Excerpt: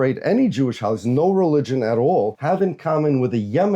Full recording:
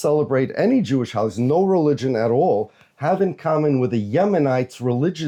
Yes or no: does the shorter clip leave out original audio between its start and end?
yes